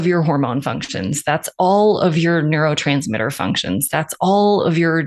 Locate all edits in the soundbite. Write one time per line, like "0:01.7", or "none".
none